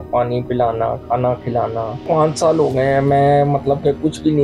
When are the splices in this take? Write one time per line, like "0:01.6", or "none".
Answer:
0:02.0